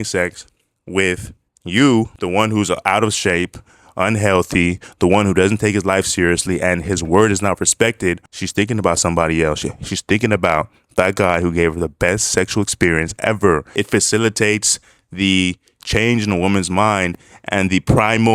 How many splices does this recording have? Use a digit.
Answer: 3